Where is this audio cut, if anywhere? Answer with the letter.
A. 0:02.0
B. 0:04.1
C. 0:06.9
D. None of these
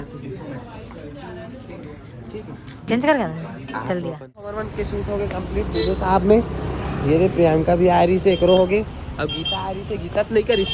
B